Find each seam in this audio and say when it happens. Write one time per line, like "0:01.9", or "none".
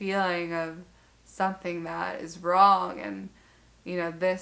none